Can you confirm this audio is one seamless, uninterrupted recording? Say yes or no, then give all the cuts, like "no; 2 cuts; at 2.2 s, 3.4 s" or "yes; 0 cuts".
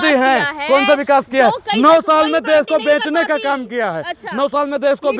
yes; 0 cuts